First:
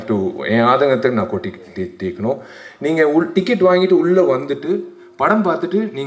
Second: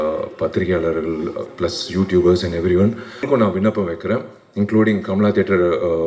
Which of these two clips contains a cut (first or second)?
second